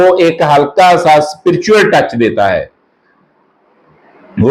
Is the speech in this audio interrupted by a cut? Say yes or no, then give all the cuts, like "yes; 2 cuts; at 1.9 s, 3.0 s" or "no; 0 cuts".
no; 0 cuts